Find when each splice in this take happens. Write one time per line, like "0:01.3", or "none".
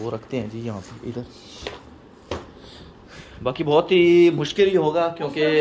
none

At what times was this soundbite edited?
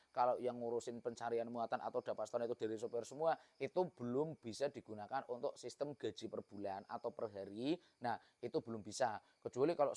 none

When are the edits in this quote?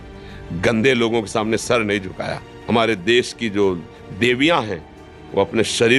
0:02.5

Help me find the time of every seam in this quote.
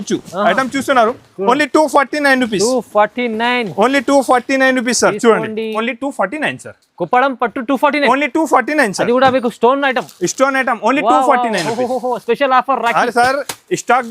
0:05.7

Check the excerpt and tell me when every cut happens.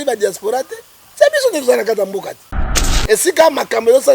0:02.9

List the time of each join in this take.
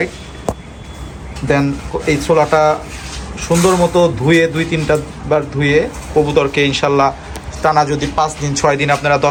none

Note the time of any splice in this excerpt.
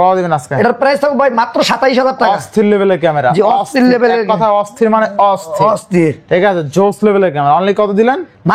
none

